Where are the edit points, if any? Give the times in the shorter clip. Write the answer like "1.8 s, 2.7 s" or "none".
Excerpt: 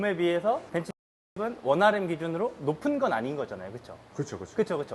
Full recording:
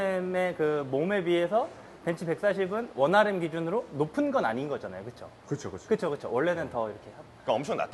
1.3 s